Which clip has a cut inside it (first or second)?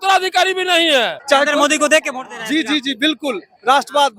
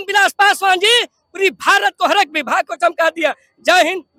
first